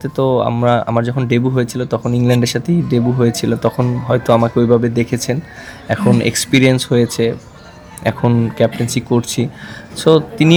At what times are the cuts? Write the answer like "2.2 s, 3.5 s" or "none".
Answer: none